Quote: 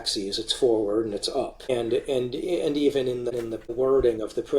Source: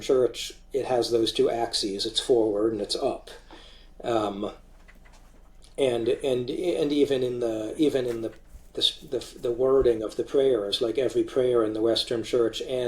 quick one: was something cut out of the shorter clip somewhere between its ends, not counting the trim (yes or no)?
yes